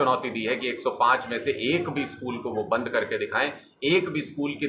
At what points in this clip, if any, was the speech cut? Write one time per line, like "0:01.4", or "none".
none